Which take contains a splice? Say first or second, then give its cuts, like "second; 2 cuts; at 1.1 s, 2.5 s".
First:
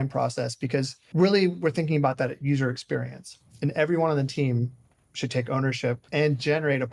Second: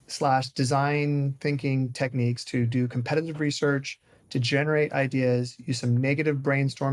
first; 2 cuts; at 1.0 s, 6.0 s